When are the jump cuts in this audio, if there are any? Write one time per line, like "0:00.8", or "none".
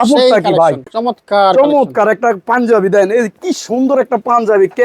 0:00.9